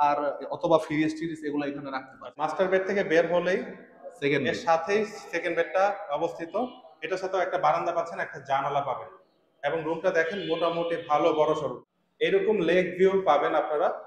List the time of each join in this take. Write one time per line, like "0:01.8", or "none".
0:02.3
0:11.8